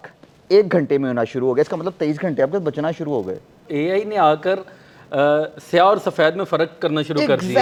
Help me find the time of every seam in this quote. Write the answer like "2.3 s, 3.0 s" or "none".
none